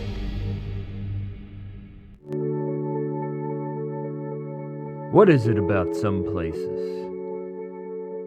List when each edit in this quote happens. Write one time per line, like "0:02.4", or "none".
0:02.1